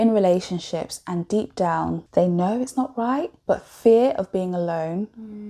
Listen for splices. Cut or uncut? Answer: cut